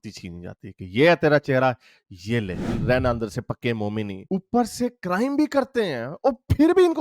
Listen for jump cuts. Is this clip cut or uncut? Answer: cut